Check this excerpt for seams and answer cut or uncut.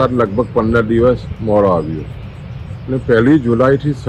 uncut